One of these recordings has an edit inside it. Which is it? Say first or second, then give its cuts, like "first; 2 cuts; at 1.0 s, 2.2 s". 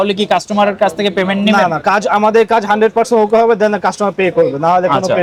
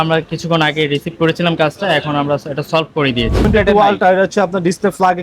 second; 1 cut; at 3.5 s